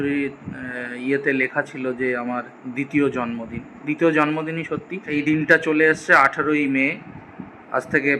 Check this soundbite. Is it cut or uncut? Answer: cut